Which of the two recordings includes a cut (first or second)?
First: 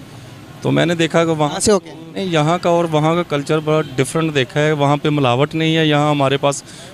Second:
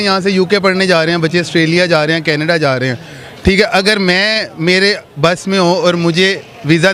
first